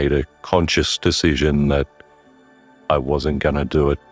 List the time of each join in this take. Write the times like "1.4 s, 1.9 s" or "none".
none